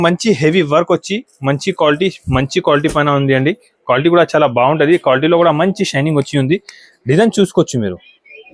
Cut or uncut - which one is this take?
uncut